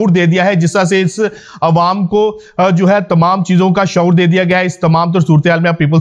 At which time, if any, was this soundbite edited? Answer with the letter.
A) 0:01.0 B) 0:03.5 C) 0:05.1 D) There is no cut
D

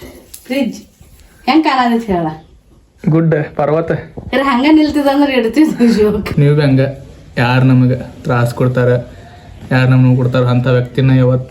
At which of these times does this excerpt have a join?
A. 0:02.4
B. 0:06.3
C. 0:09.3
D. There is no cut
B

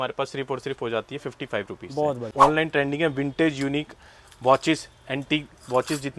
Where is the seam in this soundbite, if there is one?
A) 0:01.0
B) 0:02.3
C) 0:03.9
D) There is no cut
B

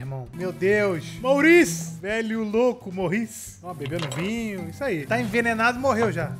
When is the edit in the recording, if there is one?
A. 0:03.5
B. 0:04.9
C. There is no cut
A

